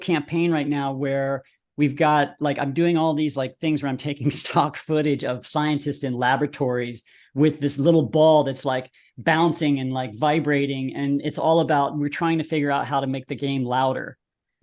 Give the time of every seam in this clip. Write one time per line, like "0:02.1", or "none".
none